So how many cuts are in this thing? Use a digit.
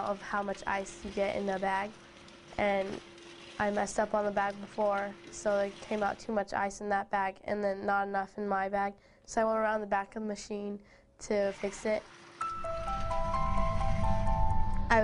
1